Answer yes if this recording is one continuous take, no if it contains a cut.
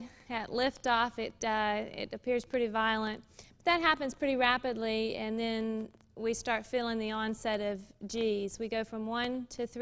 yes